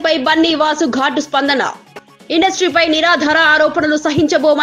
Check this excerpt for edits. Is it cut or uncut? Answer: uncut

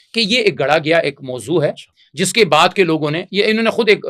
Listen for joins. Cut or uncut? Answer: uncut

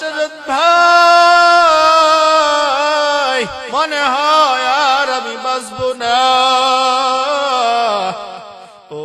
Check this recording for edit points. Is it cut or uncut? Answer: cut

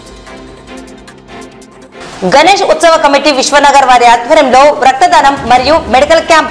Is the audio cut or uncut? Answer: cut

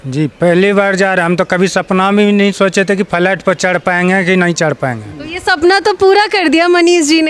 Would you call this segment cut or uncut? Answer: uncut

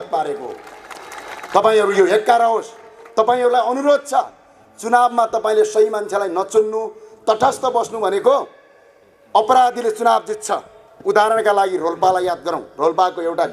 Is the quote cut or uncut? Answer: uncut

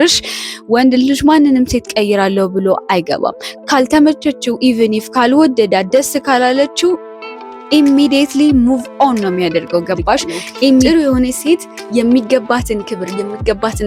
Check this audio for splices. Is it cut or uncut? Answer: cut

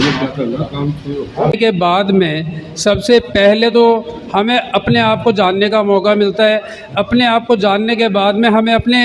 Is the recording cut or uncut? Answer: cut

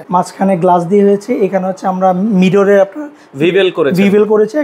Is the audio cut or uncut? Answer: uncut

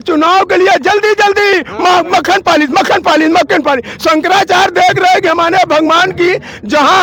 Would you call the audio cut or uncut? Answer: uncut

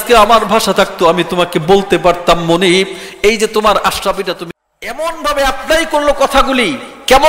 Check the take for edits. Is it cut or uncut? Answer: cut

